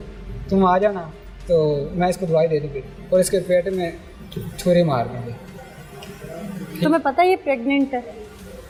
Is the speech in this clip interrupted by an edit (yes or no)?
no